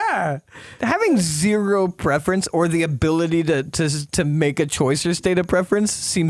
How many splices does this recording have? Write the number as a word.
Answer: zero